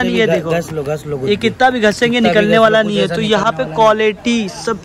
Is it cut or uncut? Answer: uncut